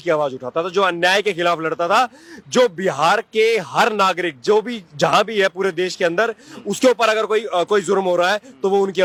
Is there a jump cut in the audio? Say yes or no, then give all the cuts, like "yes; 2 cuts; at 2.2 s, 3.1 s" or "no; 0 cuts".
no; 0 cuts